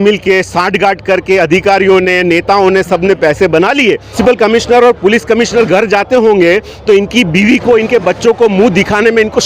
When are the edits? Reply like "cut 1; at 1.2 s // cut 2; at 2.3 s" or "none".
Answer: cut 1; at 4.2 s